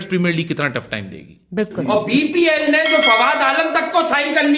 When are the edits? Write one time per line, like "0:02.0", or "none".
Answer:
0:01.8